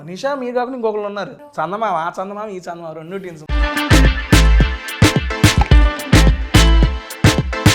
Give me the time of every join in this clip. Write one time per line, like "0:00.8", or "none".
0:01.4
0:03.4